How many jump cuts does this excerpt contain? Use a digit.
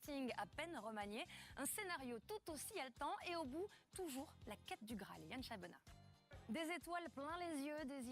1